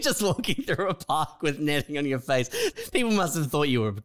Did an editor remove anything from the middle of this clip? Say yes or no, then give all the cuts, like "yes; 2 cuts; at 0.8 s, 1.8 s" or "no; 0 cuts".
yes; 1 cut; at 2.8 s